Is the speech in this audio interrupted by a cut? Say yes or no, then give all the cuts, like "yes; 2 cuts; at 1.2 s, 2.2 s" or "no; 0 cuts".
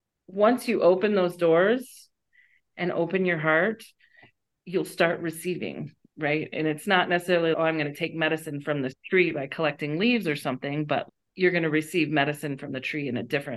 no; 0 cuts